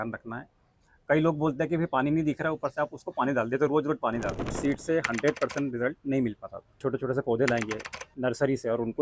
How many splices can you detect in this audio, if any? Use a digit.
2